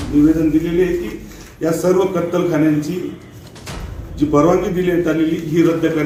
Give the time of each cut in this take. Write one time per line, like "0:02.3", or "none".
none